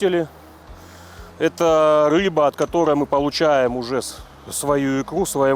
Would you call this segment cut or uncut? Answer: uncut